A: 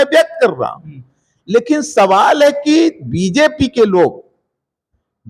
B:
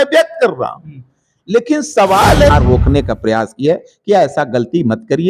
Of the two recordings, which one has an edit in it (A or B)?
B